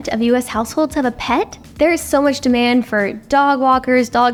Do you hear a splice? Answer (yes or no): no